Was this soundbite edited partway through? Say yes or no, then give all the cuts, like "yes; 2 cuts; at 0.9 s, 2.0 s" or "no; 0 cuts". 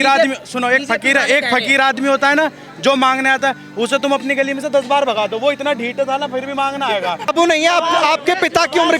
yes; 1 cut; at 7.3 s